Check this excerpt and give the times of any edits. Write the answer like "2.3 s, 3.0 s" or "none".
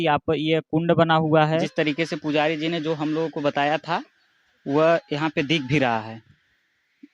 1.7 s